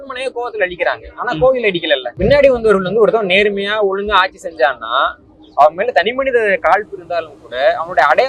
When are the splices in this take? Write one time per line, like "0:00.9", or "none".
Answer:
0:02.2